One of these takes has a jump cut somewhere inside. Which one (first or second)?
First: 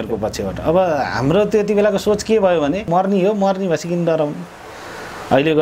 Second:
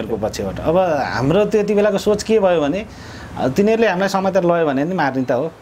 first